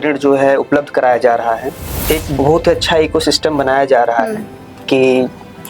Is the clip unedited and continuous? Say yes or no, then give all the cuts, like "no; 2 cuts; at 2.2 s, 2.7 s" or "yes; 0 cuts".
no; 1 cut; at 1.9 s